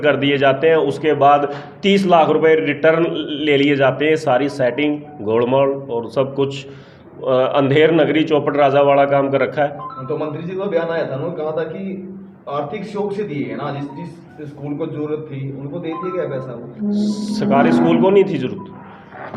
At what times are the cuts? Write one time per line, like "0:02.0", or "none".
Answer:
none